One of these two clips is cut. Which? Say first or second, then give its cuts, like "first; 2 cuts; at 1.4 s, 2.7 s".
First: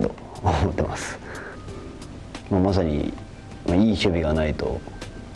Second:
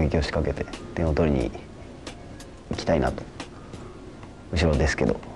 first; 1 cut; at 1.6 s